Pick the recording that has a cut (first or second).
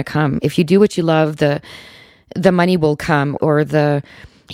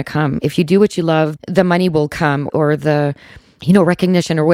second